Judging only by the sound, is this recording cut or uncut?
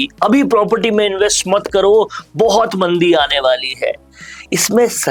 uncut